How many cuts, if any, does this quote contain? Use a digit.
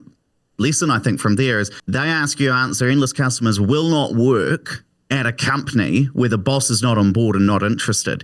1